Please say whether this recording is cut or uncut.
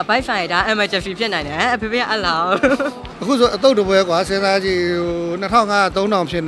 cut